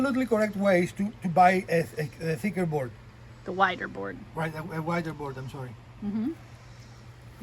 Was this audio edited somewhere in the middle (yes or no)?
no